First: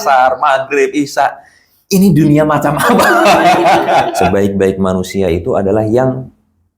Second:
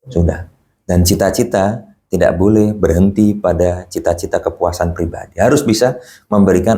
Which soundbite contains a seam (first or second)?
first